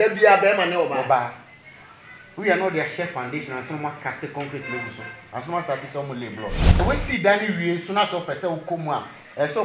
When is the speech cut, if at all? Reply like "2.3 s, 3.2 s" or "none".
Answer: 6.8 s